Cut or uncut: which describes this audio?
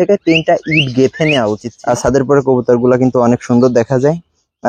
cut